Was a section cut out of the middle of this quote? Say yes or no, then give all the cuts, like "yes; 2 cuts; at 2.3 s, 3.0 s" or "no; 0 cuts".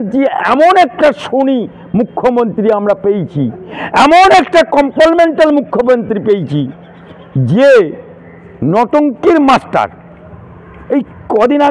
no; 0 cuts